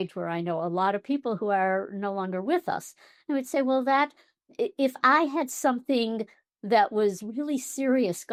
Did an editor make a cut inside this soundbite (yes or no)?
no